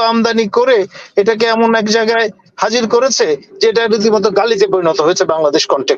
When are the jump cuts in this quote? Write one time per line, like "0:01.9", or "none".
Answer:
none